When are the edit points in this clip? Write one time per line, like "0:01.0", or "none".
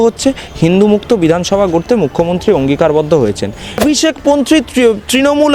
0:03.8